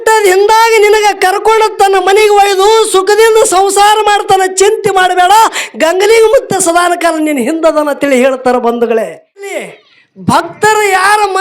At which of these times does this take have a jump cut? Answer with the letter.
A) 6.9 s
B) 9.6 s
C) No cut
B